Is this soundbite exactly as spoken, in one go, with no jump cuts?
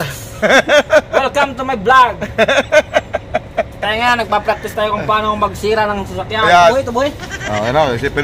no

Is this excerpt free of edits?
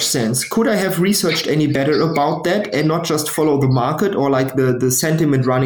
yes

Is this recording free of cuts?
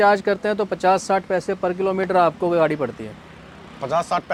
yes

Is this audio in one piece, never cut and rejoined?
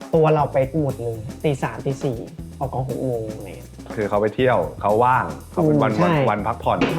no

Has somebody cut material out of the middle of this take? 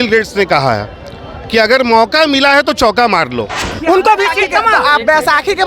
yes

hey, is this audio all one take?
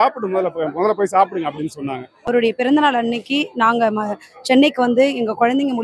no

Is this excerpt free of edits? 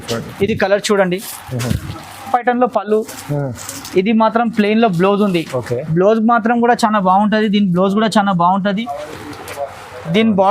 no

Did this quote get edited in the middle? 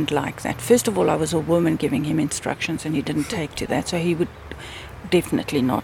no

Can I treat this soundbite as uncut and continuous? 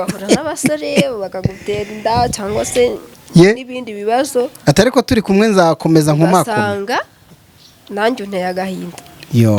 yes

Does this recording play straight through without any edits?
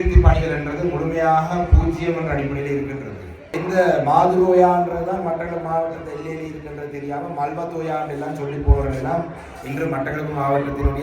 no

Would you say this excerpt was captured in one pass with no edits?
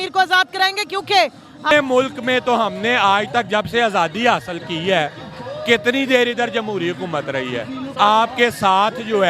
no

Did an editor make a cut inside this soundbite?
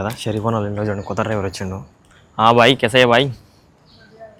no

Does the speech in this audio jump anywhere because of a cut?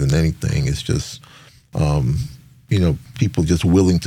no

